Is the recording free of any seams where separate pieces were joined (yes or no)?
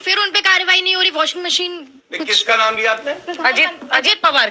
yes